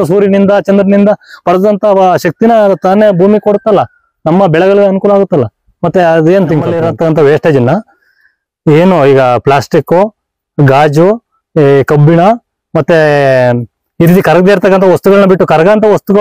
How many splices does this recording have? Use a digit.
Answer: 1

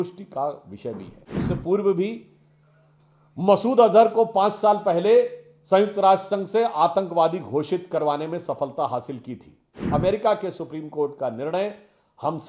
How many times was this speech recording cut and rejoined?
2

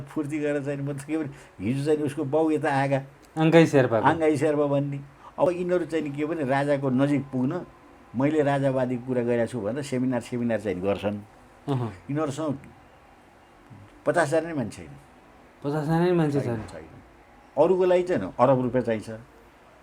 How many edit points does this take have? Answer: 2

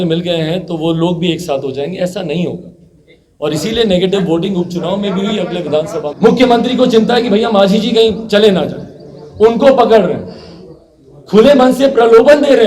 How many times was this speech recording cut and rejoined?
1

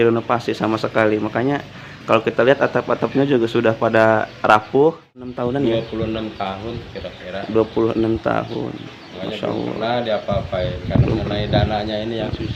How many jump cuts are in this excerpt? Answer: 1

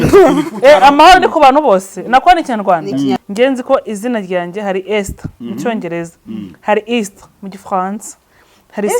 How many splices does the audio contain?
1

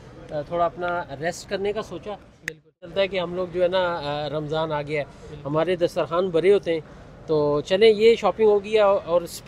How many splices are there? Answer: 1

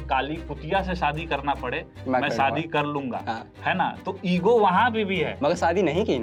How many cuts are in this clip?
0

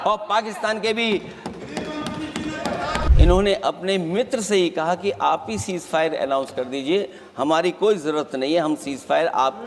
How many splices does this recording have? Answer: 1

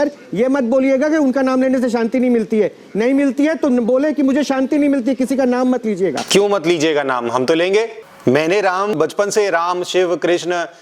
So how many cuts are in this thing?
3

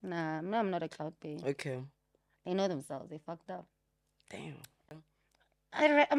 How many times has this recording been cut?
1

